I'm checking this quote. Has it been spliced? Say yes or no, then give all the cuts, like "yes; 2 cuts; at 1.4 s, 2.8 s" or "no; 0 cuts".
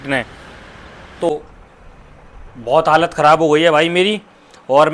yes; 1 cut; at 1.3 s